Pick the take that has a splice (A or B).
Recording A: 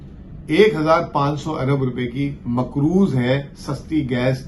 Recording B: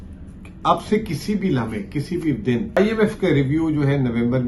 B